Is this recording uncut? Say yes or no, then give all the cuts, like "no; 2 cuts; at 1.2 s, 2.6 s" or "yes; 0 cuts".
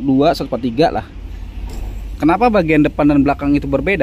yes; 0 cuts